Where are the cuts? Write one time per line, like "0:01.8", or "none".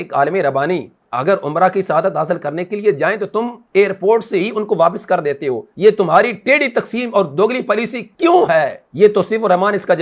none